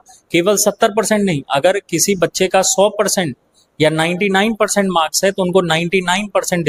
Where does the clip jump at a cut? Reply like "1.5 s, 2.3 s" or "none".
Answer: none

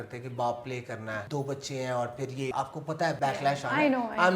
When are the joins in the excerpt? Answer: 1.2 s, 3.0 s

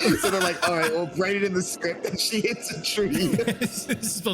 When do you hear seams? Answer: 3.4 s

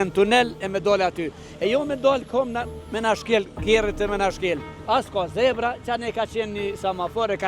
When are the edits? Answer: 4.8 s

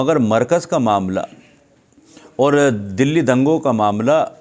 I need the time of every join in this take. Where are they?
none

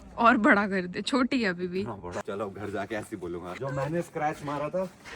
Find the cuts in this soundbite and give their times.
2.2 s, 3.6 s

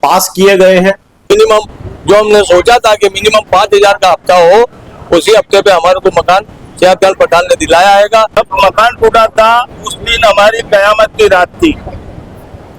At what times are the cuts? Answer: 1.3 s, 8.4 s

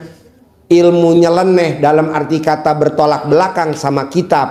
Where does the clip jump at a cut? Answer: none

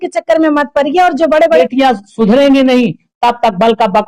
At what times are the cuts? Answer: 1.6 s

